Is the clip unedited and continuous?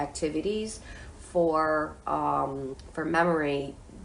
no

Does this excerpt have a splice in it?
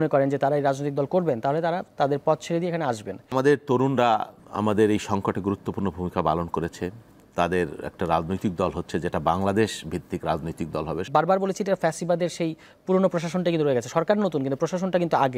yes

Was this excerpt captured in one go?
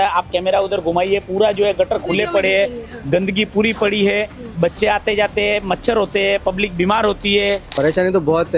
no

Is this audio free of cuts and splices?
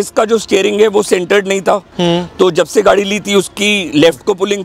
yes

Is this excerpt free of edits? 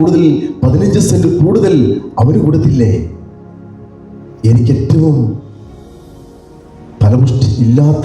yes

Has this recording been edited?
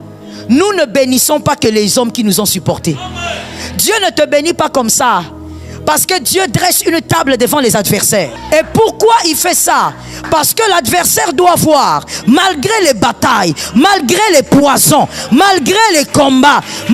yes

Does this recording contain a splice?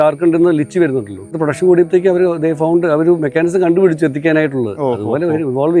yes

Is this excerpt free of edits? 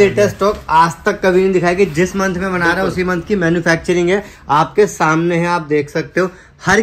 yes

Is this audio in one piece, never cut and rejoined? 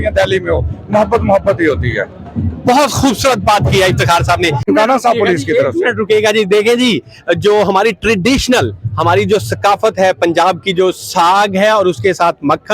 no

